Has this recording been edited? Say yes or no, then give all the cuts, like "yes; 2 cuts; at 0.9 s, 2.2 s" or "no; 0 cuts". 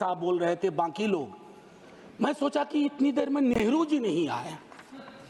no; 0 cuts